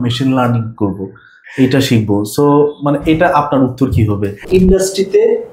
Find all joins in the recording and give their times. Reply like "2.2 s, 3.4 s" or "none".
4.4 s